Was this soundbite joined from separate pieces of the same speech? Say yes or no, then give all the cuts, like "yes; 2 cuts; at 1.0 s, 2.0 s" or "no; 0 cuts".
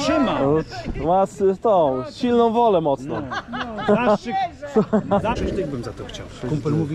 yes; 1 cut; at 5.3 s